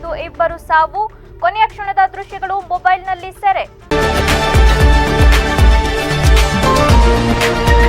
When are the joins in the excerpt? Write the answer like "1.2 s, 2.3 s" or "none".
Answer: 3.8 s